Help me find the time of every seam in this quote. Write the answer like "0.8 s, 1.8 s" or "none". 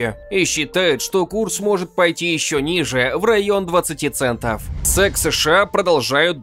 4.9 s